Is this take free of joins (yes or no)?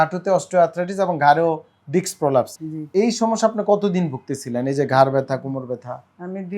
no